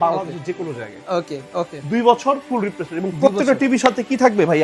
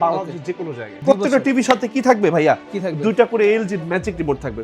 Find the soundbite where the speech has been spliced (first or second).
second